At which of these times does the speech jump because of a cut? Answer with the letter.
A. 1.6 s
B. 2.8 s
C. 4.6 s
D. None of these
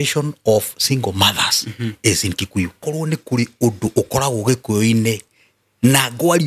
B